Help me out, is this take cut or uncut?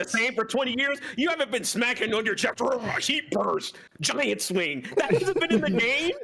uncut